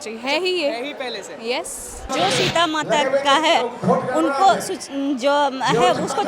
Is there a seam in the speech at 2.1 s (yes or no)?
yes